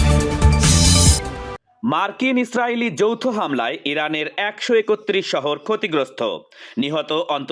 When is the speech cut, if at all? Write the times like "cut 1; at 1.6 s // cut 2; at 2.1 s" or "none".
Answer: none